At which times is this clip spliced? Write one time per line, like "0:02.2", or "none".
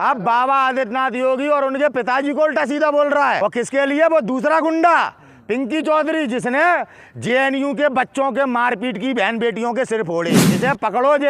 0:03.4
0:10.5